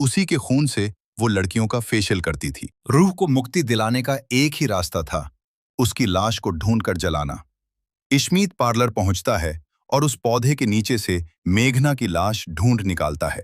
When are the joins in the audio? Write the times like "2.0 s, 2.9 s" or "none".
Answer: 2.7 s